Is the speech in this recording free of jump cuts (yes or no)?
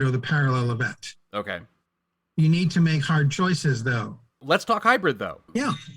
no